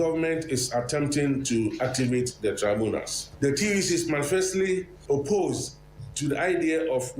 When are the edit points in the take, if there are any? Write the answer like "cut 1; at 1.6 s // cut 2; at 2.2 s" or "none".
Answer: cut 1; at 3.2 s // cut 2; at 4.9 s